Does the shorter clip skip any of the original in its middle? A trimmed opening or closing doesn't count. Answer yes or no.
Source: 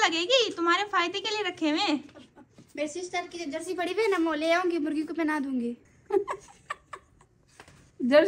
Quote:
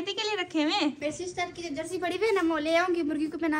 yes